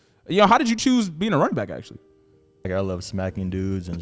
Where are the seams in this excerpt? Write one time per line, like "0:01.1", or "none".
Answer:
0:02.7